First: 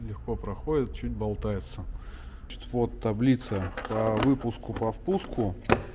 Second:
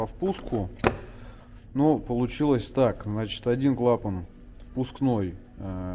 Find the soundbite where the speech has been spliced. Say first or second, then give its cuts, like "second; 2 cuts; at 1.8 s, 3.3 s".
first; 1 cut; at 2.6 s